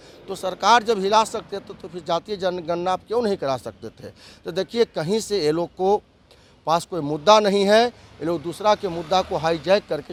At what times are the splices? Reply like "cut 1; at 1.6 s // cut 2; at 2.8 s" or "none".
none